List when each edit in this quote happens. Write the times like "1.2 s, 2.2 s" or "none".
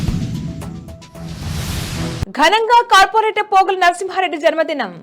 2.2 s